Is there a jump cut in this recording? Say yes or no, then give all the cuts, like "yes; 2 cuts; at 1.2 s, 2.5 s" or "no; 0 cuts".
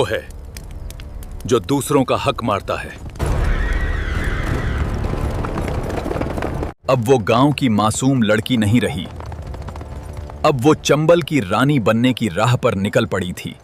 no; 0 cuts